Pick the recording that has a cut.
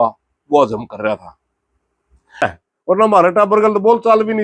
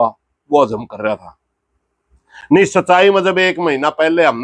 first; 1 cut; at 2.4 s

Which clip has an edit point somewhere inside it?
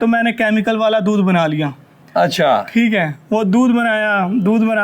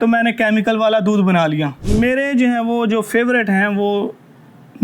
second; 1 cut; at 1.8 s

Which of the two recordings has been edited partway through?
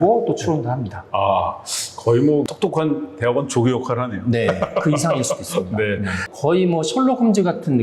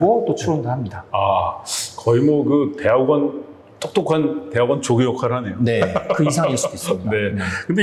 first; 2 cuts; at 2.4 s, 6.2 s

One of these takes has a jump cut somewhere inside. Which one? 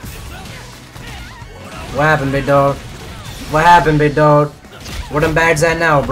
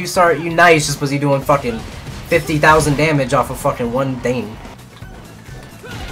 second; 1 cut; at 4.7 s

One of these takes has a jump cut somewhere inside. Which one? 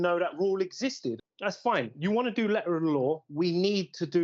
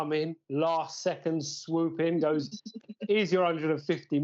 first; 1 cut; at 1.2 s

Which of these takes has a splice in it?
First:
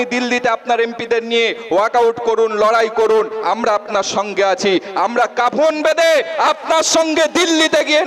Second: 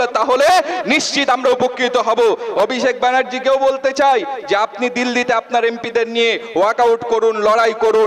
second; 1 cut; at 2.5 s

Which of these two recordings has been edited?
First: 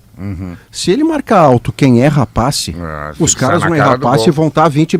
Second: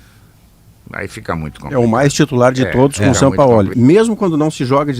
second; 1 cut; at 3.7 s

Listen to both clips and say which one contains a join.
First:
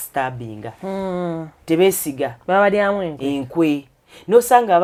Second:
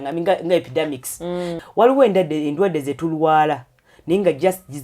second; 1 cut; at 1.5 s

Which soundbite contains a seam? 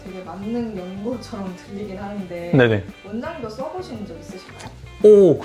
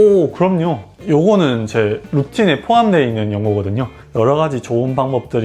second; 1 cut; at 4.0 s

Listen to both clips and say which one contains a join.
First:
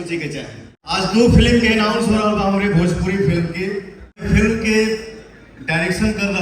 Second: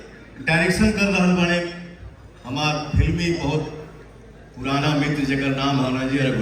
first; 2 cuts; at 0.8 s, 4.2 s

